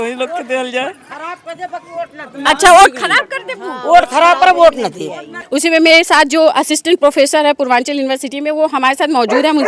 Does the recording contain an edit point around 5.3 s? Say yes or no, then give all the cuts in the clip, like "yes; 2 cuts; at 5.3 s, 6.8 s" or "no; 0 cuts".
yes; 1 cut; at 5.3 s